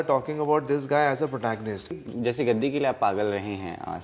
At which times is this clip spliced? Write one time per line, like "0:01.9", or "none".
0:02.0

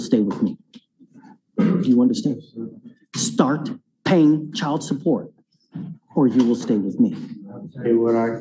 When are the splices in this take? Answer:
0:07.0

